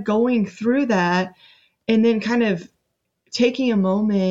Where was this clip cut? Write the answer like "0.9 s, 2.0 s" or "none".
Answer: none